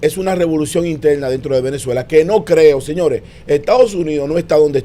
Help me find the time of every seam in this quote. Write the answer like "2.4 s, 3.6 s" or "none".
none